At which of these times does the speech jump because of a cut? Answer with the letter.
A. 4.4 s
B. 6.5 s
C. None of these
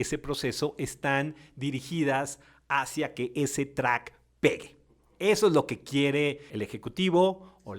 B